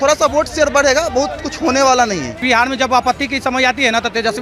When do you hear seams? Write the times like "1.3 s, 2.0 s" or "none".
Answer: 2.4 s